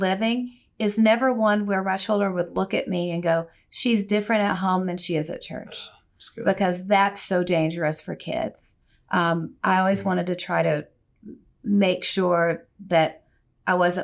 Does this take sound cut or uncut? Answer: uncut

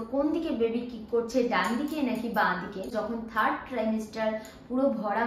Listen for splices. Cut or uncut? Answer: cut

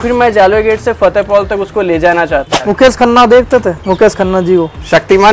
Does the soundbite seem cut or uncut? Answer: cut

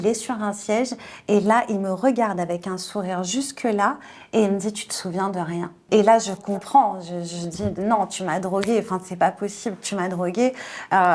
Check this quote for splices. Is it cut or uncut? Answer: uncut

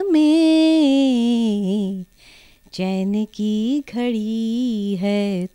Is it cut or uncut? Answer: uncut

